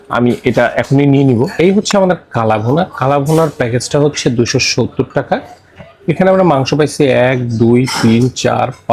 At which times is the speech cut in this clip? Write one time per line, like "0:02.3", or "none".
0:01.5